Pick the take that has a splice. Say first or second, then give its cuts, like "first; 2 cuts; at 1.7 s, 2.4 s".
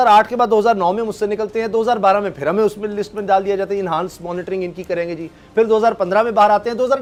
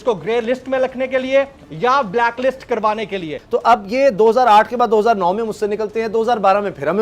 second; 1 cut; at 3.3 s